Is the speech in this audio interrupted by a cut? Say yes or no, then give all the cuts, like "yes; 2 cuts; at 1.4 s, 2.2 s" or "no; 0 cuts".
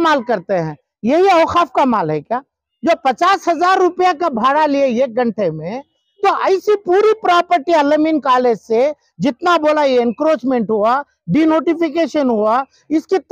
no; 0 cuts